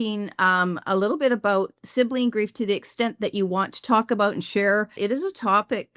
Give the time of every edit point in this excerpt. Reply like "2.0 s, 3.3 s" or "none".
5.0 s

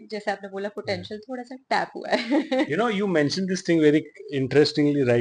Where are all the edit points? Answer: none

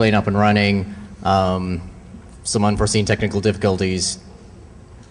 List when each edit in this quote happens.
3.7 s

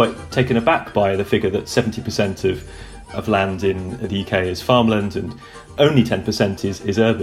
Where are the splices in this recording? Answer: none

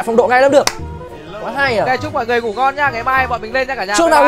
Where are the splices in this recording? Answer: none

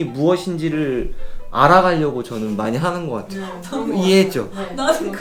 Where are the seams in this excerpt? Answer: none

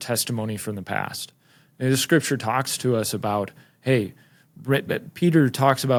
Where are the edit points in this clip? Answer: none

